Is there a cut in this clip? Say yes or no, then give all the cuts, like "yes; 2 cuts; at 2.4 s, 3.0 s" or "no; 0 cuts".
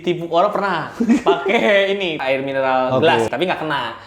yes; 2 cuts; at 2.2 s, 3.3 s